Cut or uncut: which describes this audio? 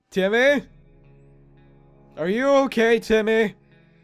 uncut